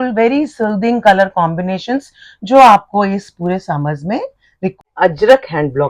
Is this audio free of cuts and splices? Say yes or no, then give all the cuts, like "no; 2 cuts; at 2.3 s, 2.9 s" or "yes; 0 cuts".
no; 1 cut; at 4.8 s